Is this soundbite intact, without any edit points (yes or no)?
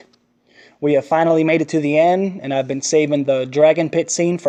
yes